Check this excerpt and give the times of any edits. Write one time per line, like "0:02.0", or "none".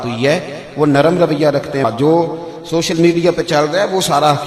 0:01.8